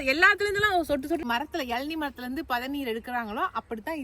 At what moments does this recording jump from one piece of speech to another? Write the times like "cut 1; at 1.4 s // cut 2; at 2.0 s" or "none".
cut 1; at 1.2 s